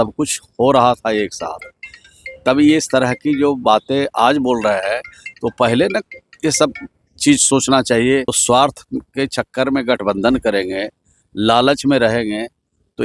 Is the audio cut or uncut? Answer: cut